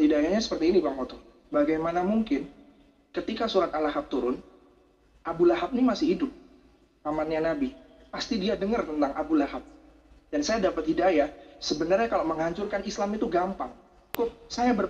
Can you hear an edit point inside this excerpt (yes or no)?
yes